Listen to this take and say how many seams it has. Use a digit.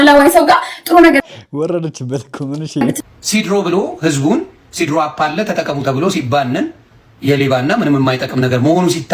1